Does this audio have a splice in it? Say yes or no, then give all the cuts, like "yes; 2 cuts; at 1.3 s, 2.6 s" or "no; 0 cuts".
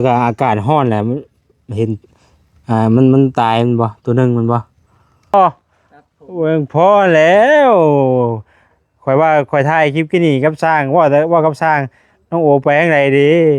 yes; 1 cut; at 5.3 s